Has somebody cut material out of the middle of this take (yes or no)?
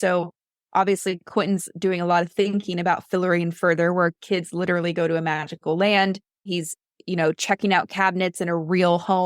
yes